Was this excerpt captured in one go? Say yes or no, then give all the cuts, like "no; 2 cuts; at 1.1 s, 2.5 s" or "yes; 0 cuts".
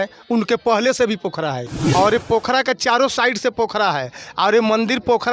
no; 1 cut; at 1.7 s